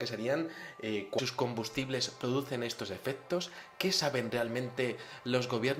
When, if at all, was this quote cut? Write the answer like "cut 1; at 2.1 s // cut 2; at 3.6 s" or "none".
none